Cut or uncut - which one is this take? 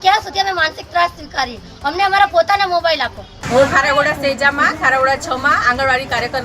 uncut